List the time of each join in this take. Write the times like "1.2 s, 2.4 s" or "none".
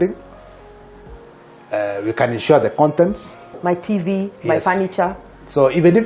3.6 s